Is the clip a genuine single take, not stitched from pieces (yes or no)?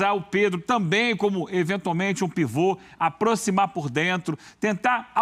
yes